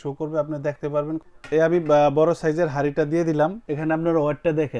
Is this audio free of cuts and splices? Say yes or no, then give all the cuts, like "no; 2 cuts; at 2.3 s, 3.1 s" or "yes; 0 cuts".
no; 2 cuts; at 0.8 s, 3.6 s